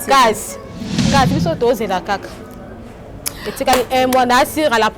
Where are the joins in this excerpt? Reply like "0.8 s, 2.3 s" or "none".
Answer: 1.0 s